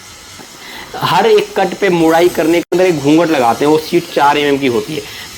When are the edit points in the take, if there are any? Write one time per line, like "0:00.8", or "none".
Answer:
0:02.7